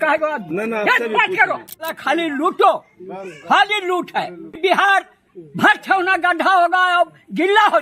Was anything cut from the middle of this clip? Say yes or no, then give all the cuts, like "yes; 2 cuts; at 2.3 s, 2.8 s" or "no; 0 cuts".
no; 0 cuts